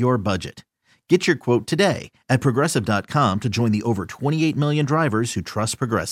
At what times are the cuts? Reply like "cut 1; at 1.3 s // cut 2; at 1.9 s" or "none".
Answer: none